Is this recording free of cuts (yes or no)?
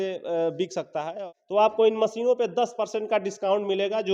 no